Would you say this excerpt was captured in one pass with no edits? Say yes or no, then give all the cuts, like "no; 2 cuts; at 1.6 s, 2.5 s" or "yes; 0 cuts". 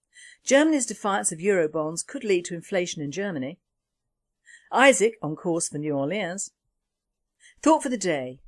no; 1 cut; at 5.7 s